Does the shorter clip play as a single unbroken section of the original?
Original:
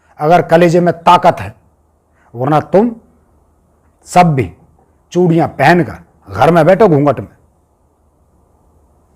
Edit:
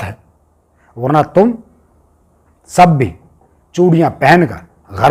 yes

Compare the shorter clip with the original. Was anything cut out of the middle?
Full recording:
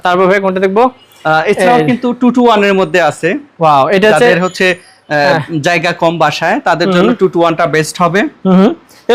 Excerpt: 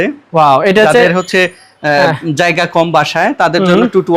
no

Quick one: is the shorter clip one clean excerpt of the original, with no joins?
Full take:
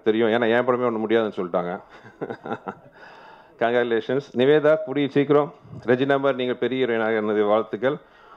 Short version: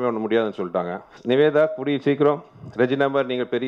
no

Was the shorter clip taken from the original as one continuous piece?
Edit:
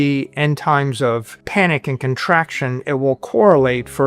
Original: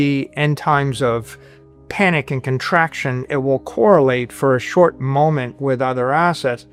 no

